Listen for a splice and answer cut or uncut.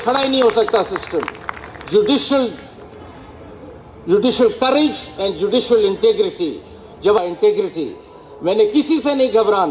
cut